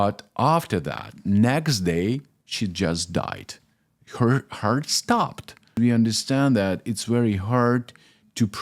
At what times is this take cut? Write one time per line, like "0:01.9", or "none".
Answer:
0:05.7